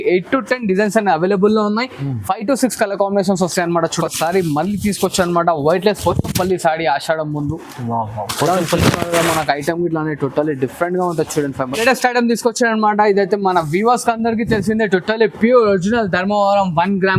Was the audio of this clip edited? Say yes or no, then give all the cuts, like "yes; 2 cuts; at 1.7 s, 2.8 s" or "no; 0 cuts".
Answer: yes; 2 cuts; at 4.0 s, 11.8 s